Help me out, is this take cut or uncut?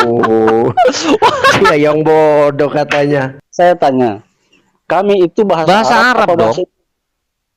cut